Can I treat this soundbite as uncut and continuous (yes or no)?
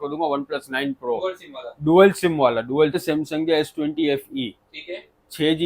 no